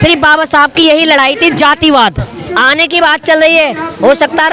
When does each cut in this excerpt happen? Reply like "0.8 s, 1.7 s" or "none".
2.4 s